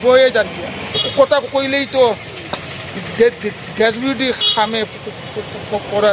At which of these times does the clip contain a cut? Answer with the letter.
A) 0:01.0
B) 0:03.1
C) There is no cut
A